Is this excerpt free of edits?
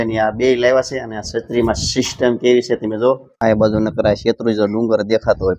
no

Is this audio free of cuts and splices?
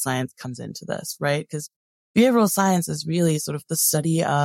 yes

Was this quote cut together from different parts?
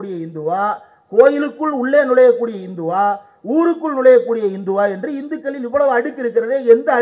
no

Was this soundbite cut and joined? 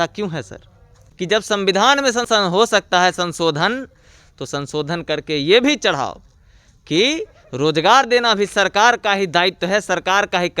yes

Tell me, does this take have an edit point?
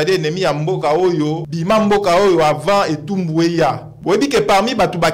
yes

